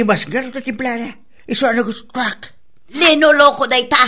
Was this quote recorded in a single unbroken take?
no; 1 cut; at 3.0 s

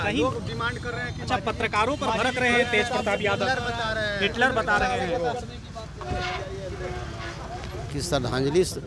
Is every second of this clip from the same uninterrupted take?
no; 1 cut; at 7.8 s

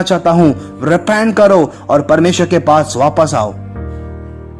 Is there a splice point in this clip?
yes; 1 cut; at 3.6 s

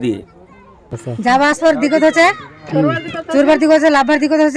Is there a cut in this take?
yes; 1 cut; at 1.0 s

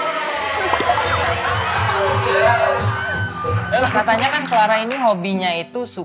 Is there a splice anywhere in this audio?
yes; 1 cut; at 3.9 s

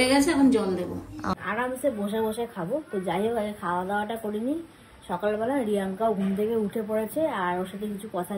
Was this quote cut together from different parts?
yes; 1 cut; at 1.3 s

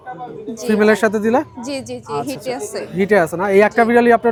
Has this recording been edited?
no; 0 cuts

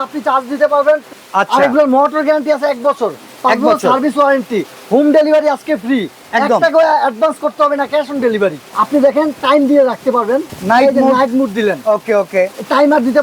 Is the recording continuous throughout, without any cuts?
no; 3 cuts; at 1.1 s, 8.7 s, 10.5 s

